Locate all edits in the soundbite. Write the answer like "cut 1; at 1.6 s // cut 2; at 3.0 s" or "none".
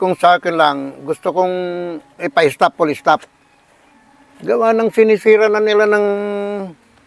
none